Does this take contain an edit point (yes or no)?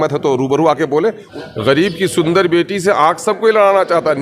yes